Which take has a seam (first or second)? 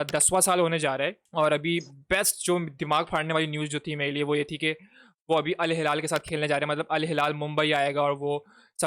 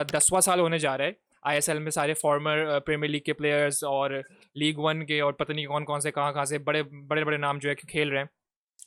first